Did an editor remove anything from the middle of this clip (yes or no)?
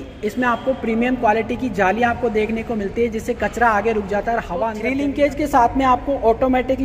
yes